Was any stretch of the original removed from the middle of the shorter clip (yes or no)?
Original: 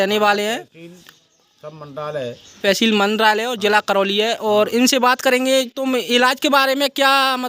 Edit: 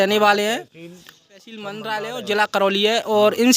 yes